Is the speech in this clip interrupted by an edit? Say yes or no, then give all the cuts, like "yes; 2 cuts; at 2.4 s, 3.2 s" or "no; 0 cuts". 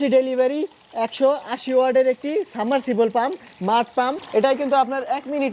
yes; 1 cut; at 4.2 s